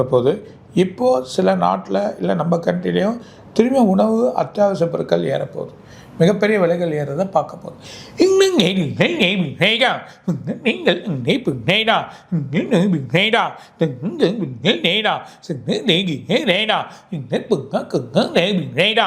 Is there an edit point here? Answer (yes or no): no